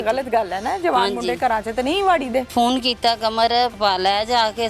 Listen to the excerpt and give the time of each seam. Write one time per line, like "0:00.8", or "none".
0:02.5
0:03.7